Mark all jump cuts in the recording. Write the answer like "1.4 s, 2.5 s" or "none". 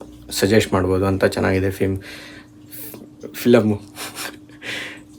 none